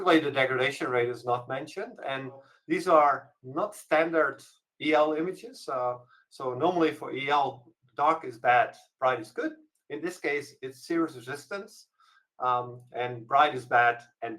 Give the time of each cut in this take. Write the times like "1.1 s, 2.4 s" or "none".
2.5 s